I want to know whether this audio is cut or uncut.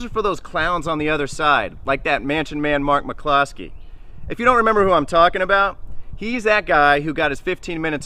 cut